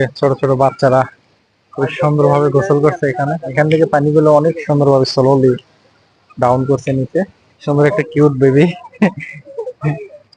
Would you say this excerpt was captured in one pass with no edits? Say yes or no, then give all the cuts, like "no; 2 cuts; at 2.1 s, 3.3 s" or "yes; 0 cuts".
no; 2 cuts; at 3.5 s, 7.5 s